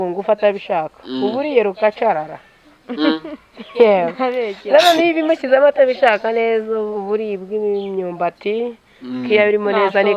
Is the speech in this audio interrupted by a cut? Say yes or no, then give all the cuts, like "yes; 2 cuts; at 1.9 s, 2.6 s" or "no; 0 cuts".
no; 0 cuts